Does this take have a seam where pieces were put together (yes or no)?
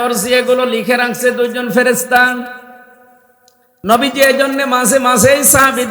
yes